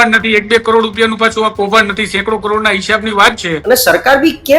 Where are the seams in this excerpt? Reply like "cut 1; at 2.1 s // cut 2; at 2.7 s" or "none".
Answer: cut 1; at 3.5 s

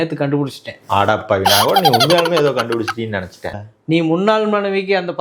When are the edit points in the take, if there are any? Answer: cut 1; at 3.7 s

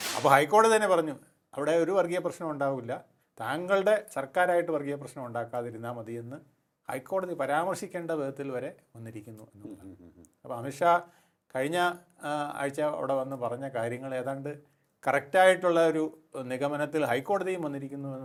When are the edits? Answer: none

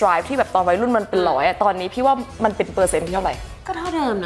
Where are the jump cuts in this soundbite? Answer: none

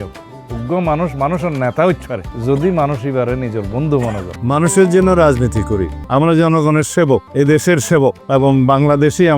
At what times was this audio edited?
cut 1; at 4.3 s // cut 2; at 6.0 s // cut 3; at 7.3 s // cut 4; at 8.2 s

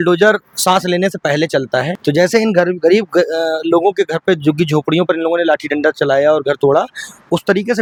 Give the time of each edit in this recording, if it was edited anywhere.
none

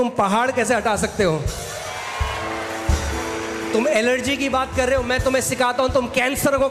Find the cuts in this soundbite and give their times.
none

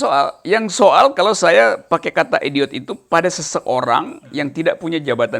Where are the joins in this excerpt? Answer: none

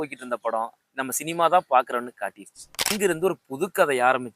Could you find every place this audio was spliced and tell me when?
cut 1; at 2.9 s

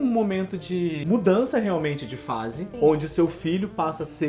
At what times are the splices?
cut 1; at 1.0 s // cut 2; at 2.6 s

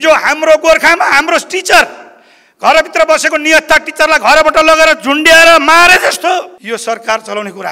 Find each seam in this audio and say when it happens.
cut 1; at 6.6 s

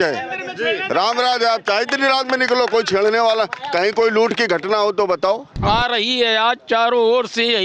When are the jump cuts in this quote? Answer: cut 1; at 5.5 s

